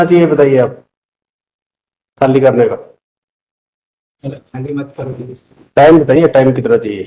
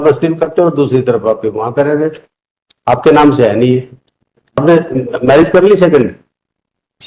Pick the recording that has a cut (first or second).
second